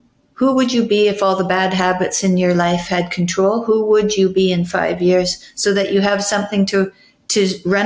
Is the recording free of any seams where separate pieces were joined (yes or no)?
yes